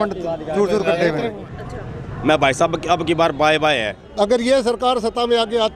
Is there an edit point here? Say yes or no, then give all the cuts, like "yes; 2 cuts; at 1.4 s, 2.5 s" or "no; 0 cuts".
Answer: yes; 2 cuts; at 1.4 s, 4.0 s